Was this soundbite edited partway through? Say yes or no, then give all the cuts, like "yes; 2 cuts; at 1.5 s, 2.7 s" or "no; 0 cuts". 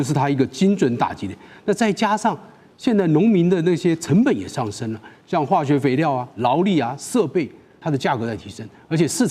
yes; 1 cut; at 7.8 s